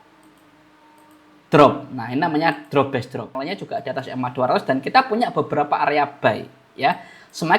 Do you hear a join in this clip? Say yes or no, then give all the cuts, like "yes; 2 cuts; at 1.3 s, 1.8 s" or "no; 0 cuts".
yes; 1 cut; at 3.4 s